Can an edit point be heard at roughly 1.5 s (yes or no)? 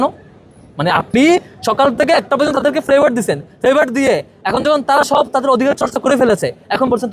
no